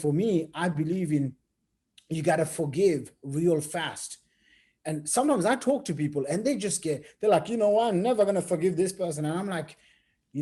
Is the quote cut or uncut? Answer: uncut